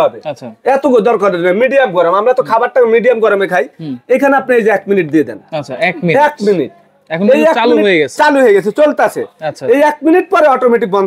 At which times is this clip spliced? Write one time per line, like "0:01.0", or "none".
none